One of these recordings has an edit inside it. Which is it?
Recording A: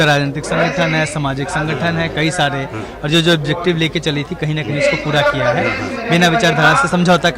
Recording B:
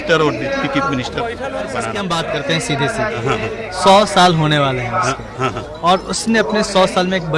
B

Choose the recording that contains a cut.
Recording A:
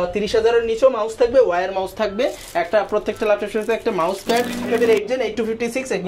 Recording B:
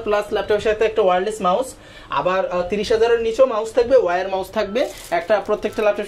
A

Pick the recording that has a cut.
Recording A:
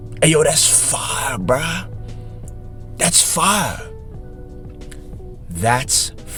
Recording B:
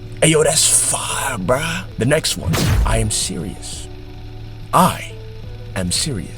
B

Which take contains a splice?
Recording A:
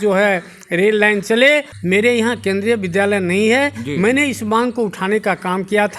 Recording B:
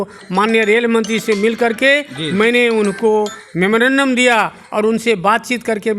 A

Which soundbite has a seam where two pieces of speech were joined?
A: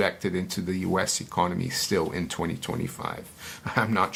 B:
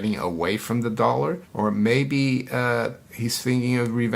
B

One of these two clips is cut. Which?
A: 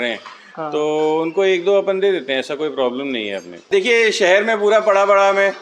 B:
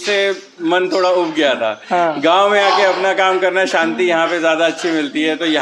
A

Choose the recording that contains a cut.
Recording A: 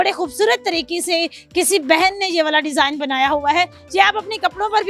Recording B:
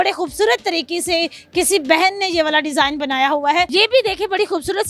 B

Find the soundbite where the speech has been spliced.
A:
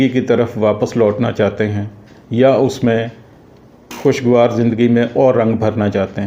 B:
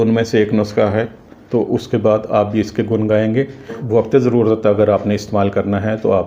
B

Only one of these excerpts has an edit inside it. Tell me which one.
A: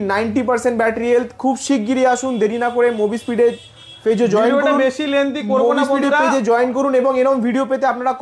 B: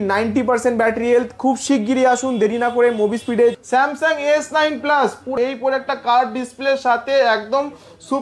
B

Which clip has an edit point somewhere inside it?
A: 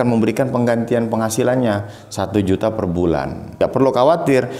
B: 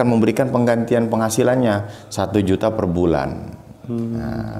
A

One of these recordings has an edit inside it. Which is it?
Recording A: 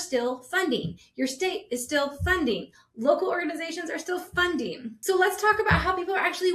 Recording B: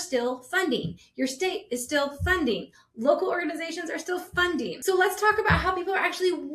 B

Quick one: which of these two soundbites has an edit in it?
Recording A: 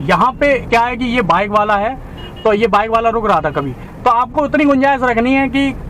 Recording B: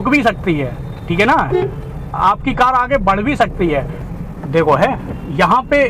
B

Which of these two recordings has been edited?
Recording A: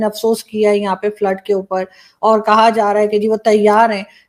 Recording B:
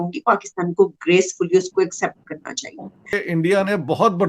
B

